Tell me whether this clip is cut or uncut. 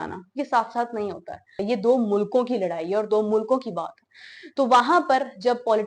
uncut